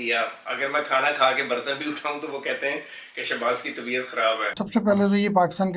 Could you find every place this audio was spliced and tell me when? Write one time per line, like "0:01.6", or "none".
0:04.5